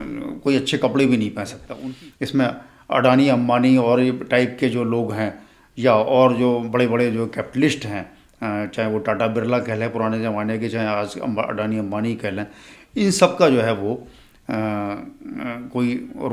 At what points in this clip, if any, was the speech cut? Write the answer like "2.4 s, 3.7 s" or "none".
1.6 s